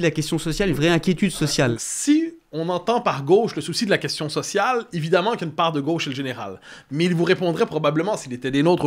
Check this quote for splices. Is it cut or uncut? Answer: cut